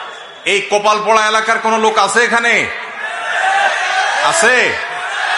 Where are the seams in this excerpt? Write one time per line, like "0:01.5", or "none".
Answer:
none